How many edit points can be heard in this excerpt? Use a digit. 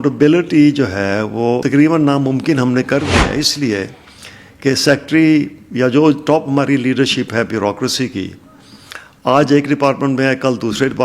1